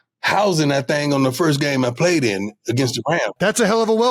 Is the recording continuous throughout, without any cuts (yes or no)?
yes